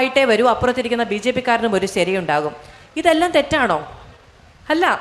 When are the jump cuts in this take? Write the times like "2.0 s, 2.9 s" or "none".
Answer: none